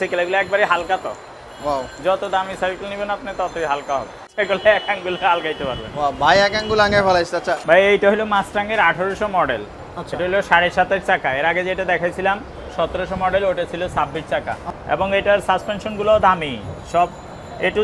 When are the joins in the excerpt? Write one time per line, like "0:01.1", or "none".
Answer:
0:04.3
0:07.6
0:14.7